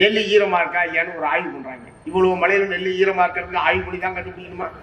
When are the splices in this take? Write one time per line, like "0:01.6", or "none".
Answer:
none